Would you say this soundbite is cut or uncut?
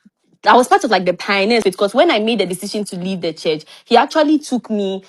cut